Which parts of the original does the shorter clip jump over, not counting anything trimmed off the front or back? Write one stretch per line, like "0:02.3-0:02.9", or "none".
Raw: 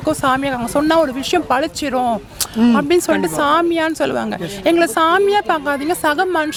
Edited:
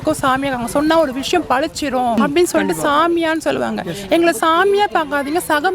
0:02.2-0:02.7